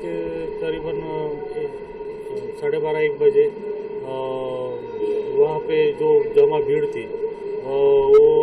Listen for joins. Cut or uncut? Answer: uncut